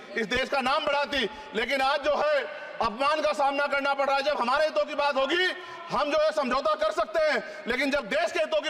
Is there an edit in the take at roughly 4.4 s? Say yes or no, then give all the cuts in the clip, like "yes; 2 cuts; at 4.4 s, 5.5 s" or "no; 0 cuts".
no; 0 cuts